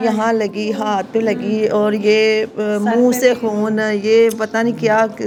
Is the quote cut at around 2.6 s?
no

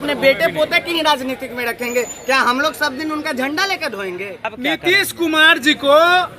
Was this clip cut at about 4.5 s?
yes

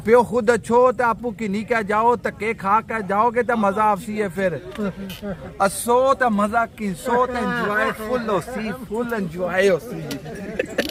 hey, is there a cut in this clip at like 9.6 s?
no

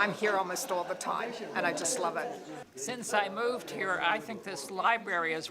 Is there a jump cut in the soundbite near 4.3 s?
no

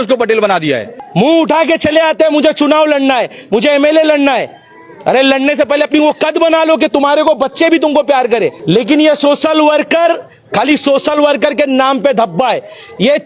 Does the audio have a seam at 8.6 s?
yes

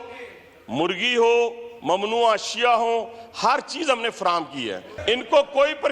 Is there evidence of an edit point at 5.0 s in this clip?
yes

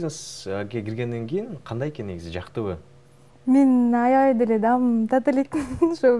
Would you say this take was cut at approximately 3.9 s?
no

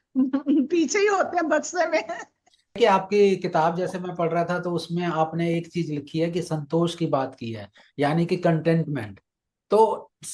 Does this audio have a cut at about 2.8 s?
yes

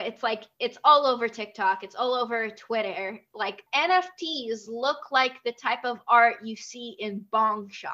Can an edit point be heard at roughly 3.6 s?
yes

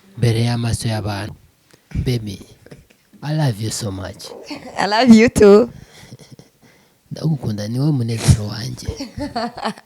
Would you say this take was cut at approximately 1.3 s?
yes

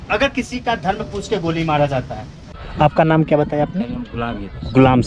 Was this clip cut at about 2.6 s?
yes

